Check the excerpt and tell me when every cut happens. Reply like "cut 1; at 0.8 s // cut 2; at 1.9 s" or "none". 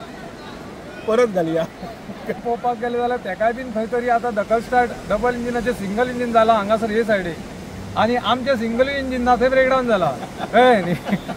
cut 1; at 2.4 s